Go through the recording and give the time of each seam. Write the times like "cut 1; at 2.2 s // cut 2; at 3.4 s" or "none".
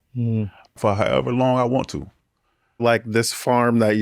cut 1; at 0.8 s // cut 2; at 2.8 s